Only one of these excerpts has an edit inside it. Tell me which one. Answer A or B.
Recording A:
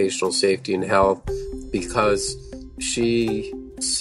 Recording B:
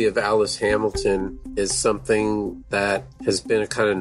B